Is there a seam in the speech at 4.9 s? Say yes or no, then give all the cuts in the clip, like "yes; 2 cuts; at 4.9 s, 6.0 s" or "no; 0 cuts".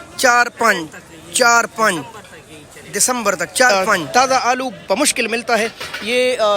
no; 1 cut; at 3.7 s